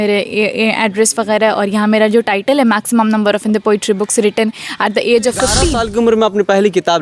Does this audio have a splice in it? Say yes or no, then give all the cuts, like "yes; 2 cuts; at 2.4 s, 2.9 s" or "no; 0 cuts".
yes; 1 cut; at 5.7 s